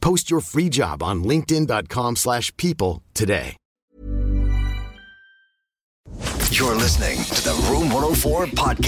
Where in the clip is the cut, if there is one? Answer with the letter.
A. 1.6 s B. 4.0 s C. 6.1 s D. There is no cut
C